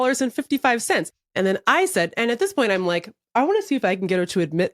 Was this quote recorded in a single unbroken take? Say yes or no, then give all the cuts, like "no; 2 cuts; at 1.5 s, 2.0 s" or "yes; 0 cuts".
no; 1 cut; at 1.2 s